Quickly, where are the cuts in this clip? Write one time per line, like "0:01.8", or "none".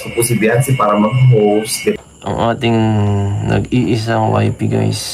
0:01.7